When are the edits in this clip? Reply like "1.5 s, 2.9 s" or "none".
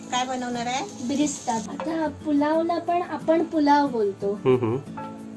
1.7 s